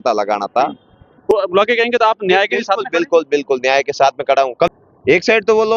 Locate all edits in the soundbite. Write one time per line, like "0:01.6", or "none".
0:01.3
0:04.7